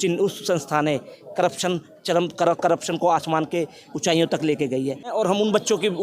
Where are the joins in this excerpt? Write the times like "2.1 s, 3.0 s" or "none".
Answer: 5.1 s

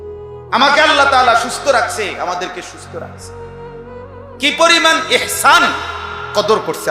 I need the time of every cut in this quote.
3.1 s, 4.4 s

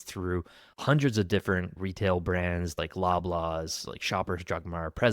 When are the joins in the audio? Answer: 1.7 s, 2.7 s

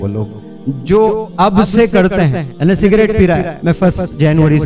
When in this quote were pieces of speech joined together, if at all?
2.4 s, 3.5 s

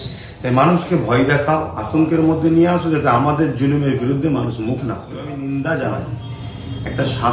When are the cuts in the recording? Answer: 5.3 s

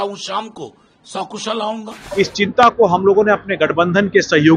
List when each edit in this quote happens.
2.0 s

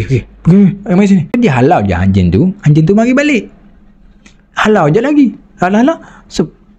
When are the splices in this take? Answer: 1.4 s

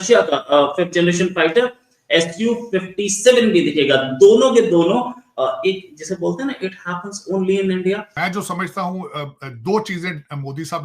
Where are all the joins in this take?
8.1 s

